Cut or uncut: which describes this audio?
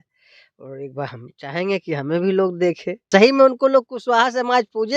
cut